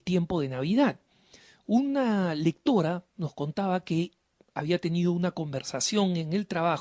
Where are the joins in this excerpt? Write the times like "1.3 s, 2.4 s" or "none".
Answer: none